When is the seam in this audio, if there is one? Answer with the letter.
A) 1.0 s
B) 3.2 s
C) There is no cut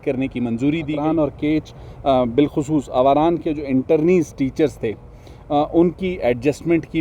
A